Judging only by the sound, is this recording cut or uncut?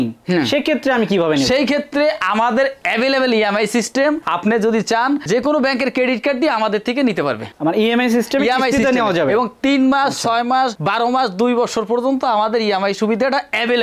uncut